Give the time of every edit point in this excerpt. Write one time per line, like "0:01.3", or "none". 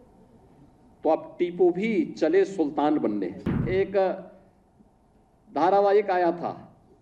0:03.6